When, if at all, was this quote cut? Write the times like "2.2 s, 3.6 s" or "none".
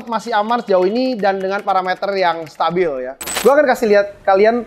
3.3 s